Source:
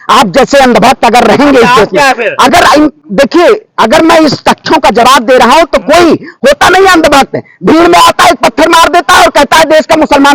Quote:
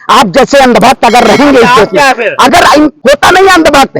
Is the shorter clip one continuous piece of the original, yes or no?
no